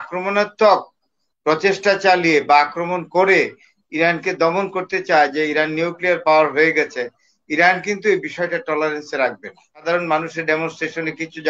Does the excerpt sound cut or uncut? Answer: cut